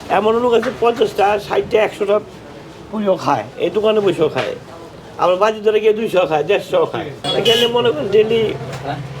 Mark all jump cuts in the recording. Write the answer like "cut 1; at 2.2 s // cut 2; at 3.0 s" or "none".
cut 1; at 7.2 s